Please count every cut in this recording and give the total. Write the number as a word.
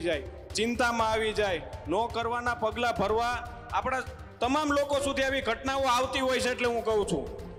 zero